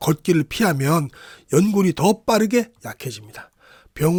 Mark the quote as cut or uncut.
uncut